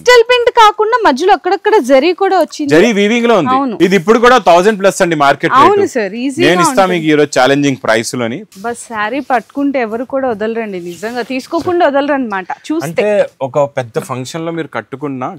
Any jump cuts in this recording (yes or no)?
yes